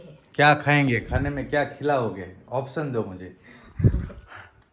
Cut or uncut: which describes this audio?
uncut